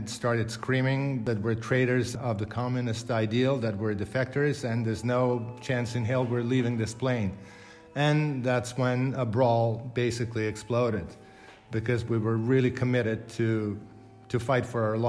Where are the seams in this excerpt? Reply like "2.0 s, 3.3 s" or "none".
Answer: 1.2 s, 2.1 s